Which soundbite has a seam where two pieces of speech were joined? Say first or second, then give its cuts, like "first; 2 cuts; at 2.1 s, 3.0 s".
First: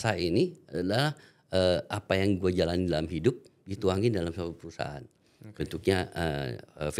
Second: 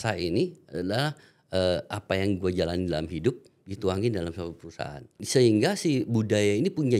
second; 1 cut; at 5.2 s